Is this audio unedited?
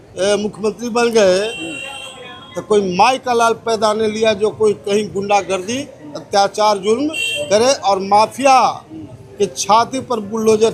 yes; 0 cuts

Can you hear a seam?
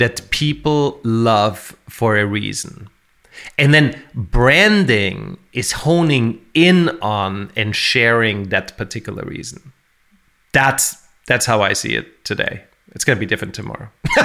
no; 0 cuts

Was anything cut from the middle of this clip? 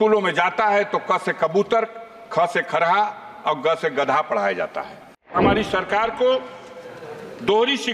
yes; 1 cut; at 5.4 s

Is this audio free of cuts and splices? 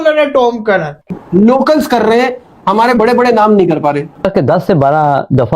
no; 2 cuts; at 1.2 s, 4.3 s

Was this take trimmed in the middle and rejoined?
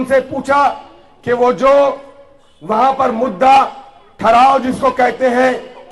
no; 0 cuts

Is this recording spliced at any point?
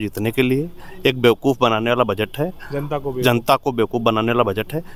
no; 0 cuts

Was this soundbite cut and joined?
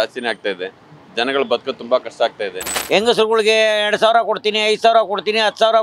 yes; 1 cut; at 2.7 s

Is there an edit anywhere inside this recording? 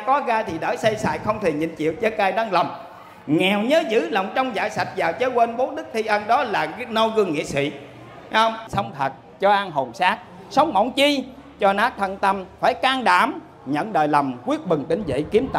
yes; 1 cut; at 8.6 s

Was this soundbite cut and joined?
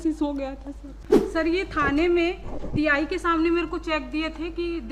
yes; 1 cut; at 0.9 s

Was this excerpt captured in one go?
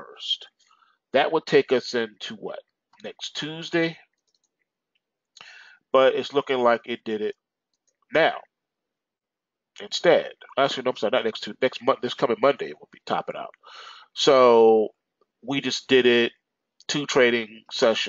yes; 0 cuts

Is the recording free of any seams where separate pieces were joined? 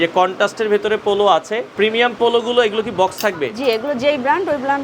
no; 1 cut; at 1.7 s

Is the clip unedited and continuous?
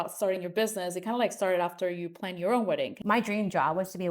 no; 1 cut; at 2.9 s

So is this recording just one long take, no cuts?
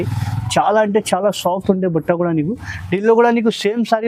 yes; 0 cuts

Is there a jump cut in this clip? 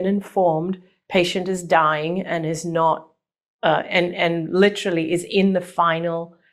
no; 0 cuts

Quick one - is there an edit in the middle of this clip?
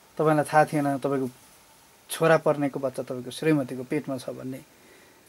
no; 0 cuts

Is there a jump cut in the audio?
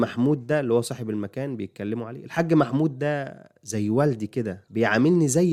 no; 0 cuts

